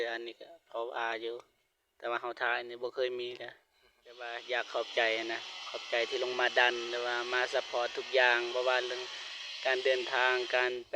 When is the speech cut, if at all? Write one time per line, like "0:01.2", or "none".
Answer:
0:04.3